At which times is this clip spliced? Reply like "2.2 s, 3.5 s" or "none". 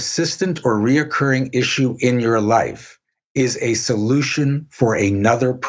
none